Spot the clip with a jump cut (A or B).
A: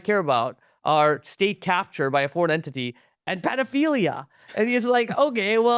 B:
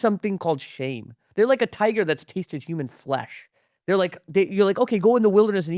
B